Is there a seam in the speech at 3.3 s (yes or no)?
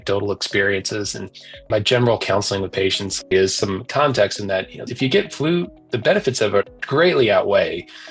yes